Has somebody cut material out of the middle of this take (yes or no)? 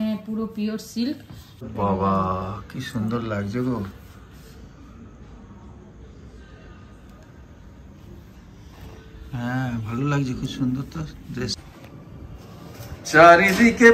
yes